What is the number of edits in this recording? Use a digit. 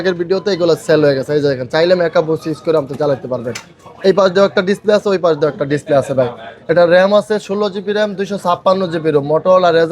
0